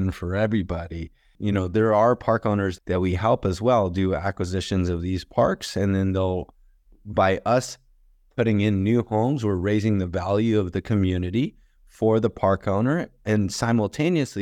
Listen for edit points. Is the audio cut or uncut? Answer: cut